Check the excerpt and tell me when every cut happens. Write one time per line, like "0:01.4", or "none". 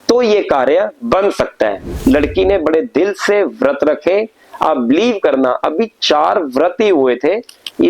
0:01.9